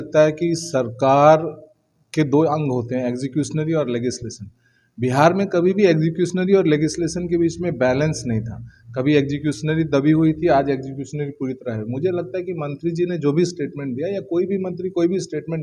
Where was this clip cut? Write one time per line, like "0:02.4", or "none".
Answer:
none